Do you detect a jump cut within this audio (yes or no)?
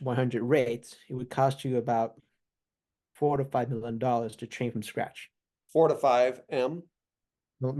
no